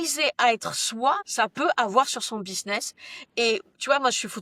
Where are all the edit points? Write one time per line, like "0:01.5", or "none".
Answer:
none